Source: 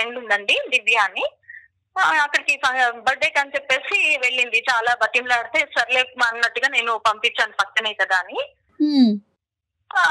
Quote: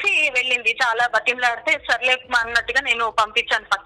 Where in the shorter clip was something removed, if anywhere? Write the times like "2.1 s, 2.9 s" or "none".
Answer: none